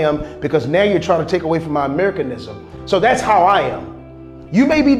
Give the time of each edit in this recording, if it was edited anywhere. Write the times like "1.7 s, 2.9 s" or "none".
none